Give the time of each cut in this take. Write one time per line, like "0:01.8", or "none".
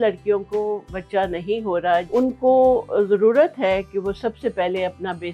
0:02.1